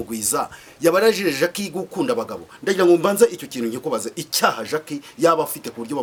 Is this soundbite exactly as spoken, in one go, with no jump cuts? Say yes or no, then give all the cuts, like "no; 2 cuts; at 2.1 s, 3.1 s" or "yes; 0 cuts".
yes; 0 cuts